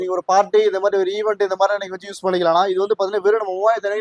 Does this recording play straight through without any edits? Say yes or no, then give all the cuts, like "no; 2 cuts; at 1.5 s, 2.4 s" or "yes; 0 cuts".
yes; 0 cuts